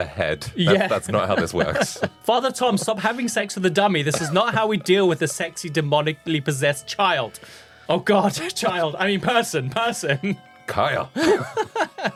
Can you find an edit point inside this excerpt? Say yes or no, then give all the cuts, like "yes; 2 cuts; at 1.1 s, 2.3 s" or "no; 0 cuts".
no; 0 cuts